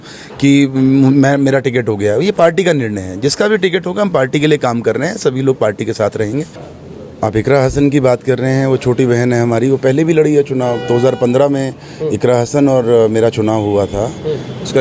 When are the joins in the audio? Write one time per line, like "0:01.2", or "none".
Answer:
0:06.6